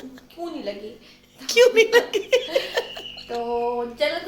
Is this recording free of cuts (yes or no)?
yes